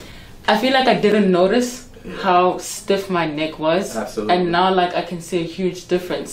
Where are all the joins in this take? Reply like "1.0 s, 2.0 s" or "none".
none